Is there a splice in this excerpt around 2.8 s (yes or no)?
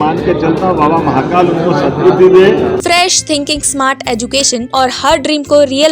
yes